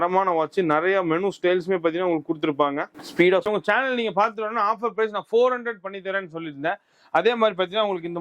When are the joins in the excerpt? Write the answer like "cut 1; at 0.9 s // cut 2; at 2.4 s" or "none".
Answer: cut 1; at 3.5 s